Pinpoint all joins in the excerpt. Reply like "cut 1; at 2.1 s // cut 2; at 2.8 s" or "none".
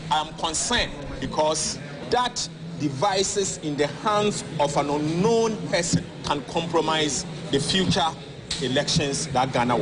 cut 1; at 1.1 s // cut 2; at 2.0 s // cut 3; at 6.1 s // cut 4; at 7.3 s